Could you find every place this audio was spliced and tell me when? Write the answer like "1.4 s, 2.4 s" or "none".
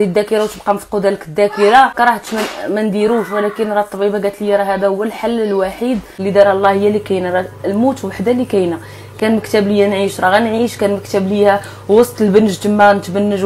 1.9 s, 6.1 s